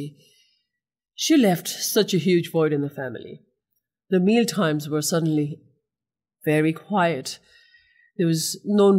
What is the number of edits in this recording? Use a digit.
0